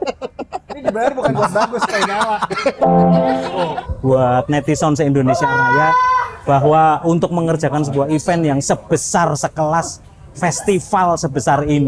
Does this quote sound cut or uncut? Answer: cut